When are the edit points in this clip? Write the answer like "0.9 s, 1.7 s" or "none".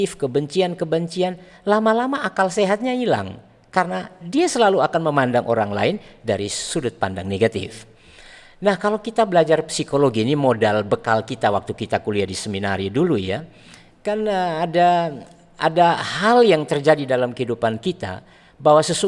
none